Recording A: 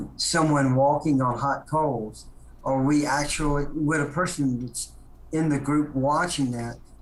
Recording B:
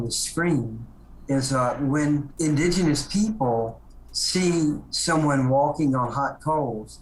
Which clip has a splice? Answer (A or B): B